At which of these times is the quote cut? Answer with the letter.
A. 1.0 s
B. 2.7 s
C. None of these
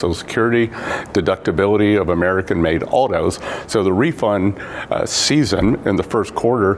A